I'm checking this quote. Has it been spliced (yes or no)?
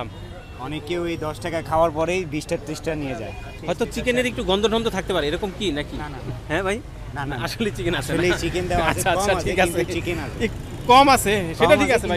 yes